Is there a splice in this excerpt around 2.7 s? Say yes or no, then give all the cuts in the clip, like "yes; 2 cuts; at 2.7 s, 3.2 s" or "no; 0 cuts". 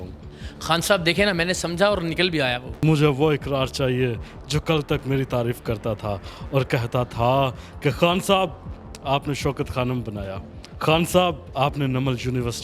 yes; 1 cut; at 2.7 s